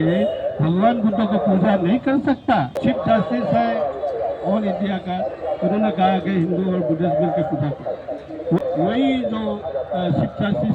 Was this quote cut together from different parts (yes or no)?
yes